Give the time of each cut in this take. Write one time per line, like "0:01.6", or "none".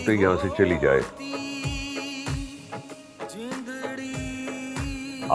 none